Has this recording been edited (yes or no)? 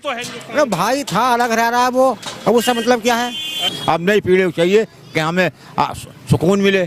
yes